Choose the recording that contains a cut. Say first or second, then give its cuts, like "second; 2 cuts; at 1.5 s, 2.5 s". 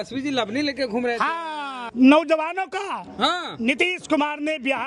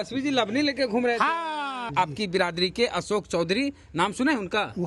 second; 1 cut; at 1.9 s